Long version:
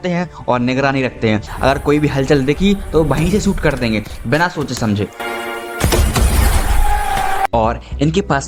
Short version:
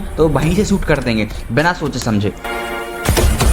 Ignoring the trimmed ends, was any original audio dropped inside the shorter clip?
no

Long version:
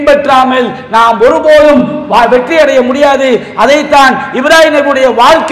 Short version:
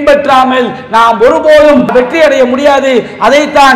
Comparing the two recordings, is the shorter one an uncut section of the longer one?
no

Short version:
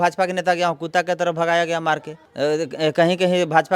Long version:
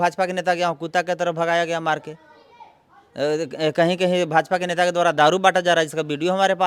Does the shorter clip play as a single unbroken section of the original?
no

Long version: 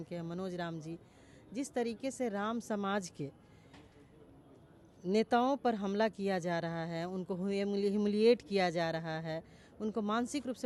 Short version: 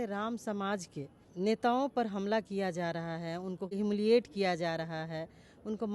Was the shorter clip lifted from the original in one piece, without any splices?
no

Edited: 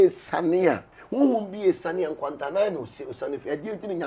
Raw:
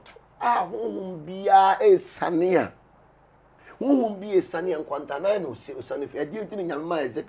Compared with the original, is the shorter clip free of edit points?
no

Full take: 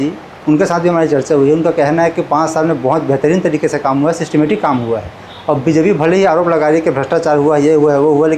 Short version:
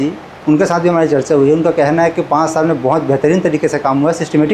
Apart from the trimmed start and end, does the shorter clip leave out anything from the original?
no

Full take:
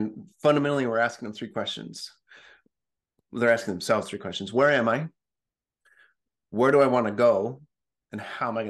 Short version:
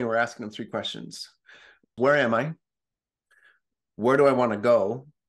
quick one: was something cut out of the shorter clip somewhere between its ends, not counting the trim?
yes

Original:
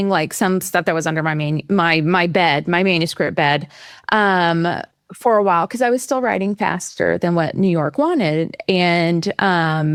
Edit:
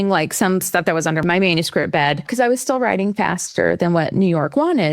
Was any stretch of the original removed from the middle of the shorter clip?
yes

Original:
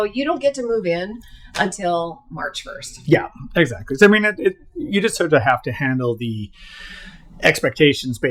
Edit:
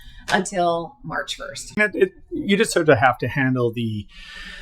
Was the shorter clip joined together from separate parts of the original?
yes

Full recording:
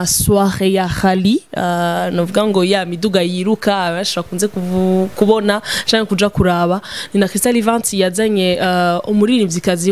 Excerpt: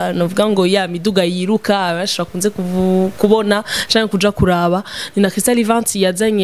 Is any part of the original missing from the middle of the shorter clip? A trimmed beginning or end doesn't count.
no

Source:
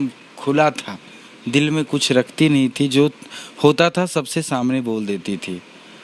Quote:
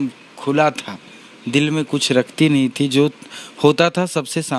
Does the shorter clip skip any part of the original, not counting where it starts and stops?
no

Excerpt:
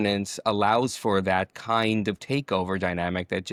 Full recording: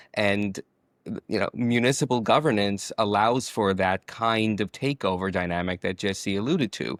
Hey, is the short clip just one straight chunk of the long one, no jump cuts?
yes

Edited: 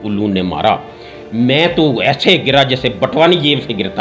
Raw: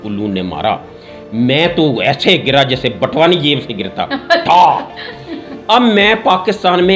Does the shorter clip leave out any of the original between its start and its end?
no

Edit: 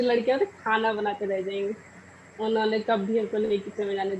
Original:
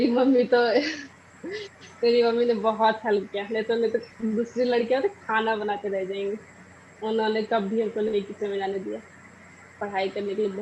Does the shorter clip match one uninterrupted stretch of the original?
yes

